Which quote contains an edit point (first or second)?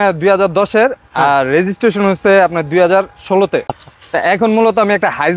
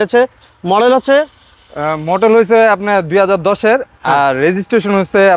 first